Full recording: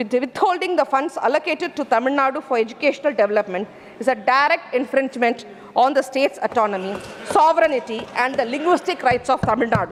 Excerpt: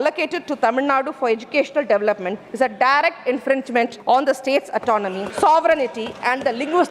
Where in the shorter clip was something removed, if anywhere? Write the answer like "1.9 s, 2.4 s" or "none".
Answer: 2.4 s, 4.0 s, 5.2 s